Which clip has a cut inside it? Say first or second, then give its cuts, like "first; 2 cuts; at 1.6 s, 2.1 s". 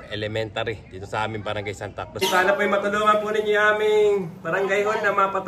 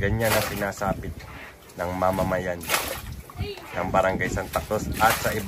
first; 1 cut; at 2.2 s